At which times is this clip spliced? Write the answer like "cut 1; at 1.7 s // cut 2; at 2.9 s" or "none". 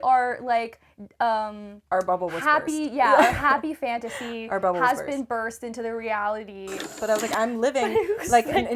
cut 1; at 7.0 s

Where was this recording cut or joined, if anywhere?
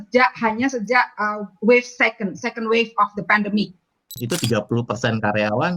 cut 1; at 4.2 s

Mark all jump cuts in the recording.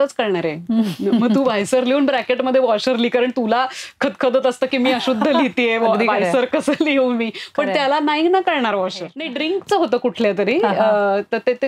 cut 1; at 9.2 s

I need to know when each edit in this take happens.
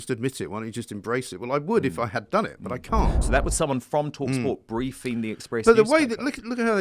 cut 1; at 3.2 s

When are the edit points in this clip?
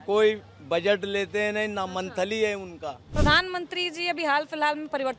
cut 1; at 3.0 s

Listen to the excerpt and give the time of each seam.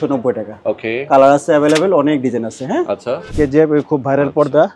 cut 1; at 3.3 s

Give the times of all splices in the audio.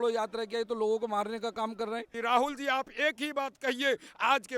cut 1; at 2.1 s

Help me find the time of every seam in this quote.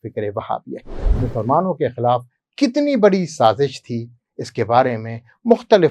cut 1; at 1.1 s

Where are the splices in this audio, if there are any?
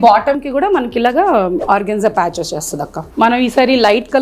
cut 1; at 1.6 s // cut 2; at 3.0 s

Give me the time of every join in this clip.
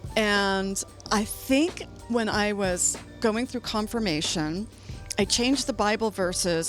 cut 1; at 0.9 s

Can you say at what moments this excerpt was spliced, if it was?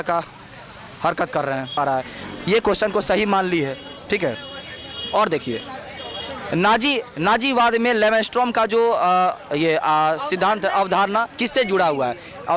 cut 1; at 1.7 s

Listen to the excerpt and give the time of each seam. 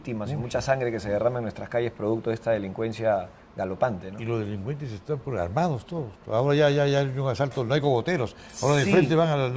none

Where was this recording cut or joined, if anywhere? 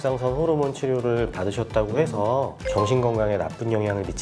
none

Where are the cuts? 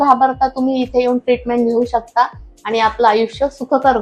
none

